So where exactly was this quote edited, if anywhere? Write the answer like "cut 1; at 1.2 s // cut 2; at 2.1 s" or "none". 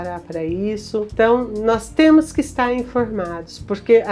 cut 1; at 1.1 s